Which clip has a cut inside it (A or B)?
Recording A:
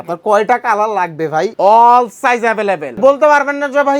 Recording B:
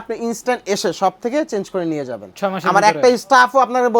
A